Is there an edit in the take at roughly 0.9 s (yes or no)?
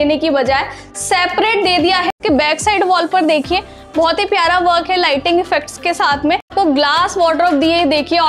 no